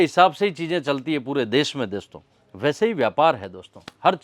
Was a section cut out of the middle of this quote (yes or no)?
no